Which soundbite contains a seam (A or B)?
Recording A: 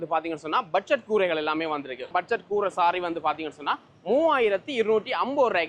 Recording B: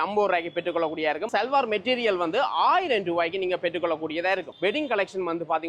B